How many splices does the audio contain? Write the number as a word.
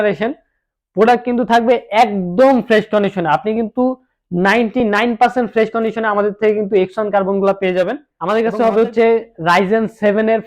one